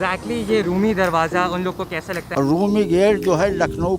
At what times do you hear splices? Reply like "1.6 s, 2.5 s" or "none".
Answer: 2.2 s